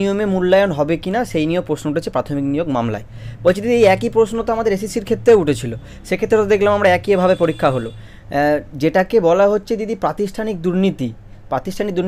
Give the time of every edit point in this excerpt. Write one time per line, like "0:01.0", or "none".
none